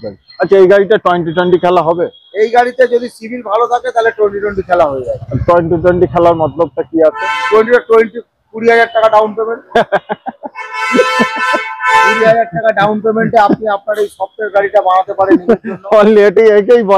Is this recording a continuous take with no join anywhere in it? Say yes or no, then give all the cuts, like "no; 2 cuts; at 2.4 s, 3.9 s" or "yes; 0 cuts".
yes; 0 cuts